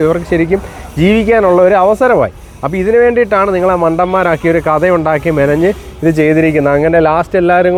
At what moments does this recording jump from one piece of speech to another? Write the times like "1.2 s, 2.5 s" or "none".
none